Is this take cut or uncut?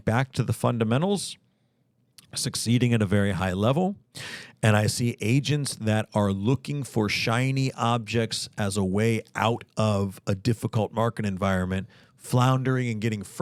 uncut